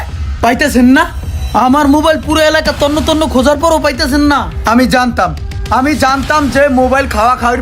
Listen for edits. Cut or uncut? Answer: uncut